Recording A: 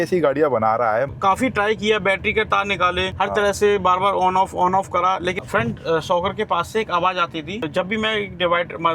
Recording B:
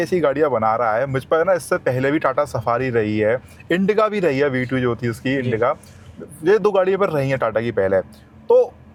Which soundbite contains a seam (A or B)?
A